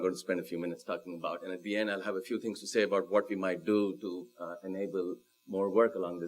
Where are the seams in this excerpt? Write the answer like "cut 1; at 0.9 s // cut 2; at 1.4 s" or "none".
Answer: cut 1; at 4.1 s